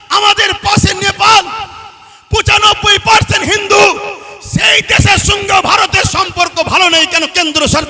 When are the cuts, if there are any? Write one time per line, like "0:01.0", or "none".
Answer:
none